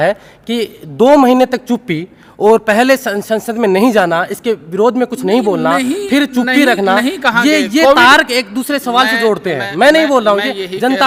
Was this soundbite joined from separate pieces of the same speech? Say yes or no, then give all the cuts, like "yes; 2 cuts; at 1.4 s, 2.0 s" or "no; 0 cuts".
no; 0 cuts